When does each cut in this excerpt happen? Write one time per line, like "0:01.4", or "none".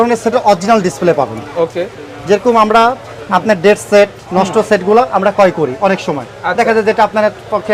none